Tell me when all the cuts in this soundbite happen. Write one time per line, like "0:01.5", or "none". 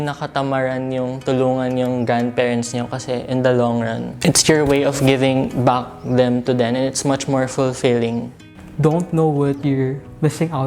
0:04.1
0:08.5